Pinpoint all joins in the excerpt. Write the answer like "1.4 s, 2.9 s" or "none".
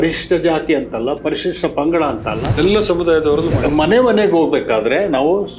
2.5 s, 3.6 s